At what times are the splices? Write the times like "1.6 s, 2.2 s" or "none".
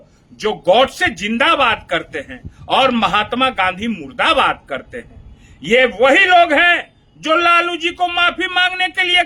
none